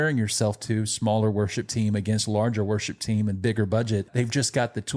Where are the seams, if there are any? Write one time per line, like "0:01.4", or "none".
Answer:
0:04.1